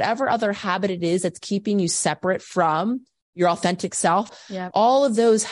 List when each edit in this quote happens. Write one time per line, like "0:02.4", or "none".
0:04.3

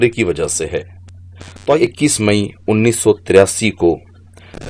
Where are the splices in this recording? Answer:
0:01.8

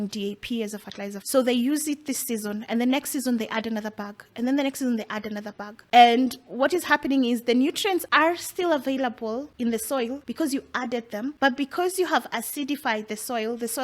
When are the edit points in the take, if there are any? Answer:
0:01.2
0:05.8
0:08.1
0:09.5
0:10.2
0:11.3

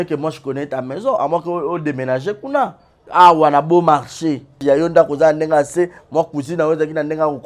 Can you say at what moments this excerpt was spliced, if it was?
0:03.0
0:04.6

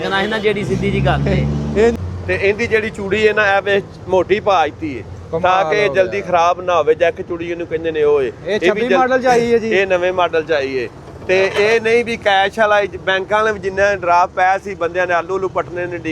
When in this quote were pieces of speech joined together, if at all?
0:01.9

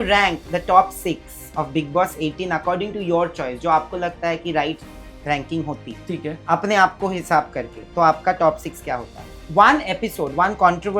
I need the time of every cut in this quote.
0:09.4

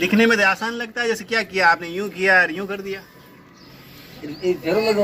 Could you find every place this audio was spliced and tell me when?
none

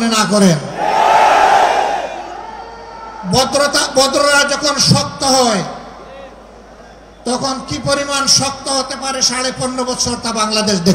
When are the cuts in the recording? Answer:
none

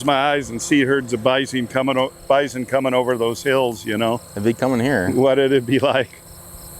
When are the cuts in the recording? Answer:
none

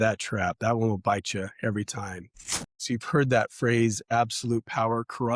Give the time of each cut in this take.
0:02.7

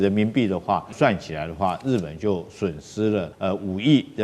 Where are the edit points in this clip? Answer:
0:00.9
0:03.3

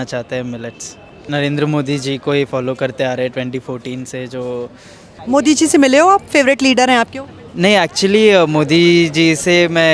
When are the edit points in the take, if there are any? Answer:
0:01.2
0:05.1

